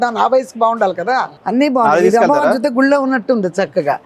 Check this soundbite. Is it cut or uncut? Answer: cut